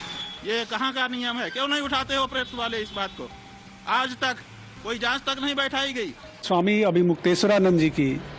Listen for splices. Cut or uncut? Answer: cut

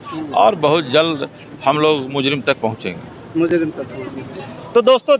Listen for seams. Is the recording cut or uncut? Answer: uncut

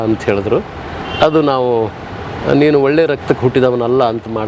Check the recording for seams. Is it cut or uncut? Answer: uncut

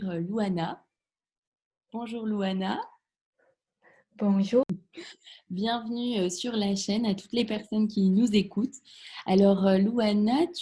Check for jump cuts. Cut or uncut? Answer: cut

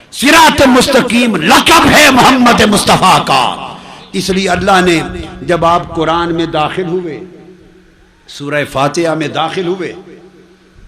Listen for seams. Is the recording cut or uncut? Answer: uncut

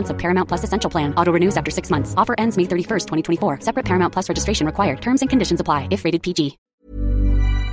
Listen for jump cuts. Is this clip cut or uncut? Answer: cut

